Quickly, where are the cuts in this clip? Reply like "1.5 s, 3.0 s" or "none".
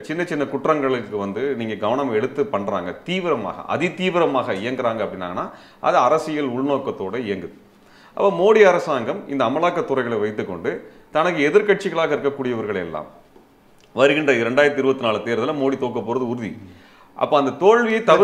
none